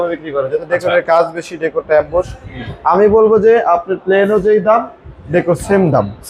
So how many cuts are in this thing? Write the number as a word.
zero